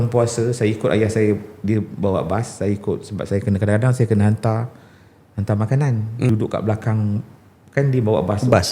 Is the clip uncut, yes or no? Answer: no